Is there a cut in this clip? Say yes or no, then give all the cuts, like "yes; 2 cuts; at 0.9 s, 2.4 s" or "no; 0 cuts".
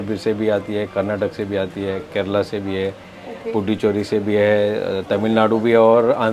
no; 0 cuts